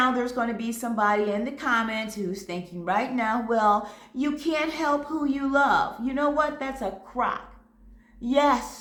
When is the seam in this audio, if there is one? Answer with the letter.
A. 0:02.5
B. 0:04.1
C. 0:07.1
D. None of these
D